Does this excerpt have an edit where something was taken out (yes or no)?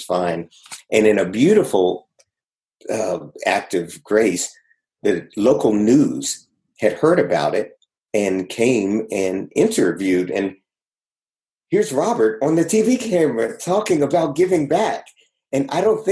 no